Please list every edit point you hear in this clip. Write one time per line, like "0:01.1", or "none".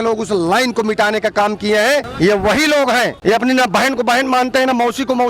0:02.1
0:03.1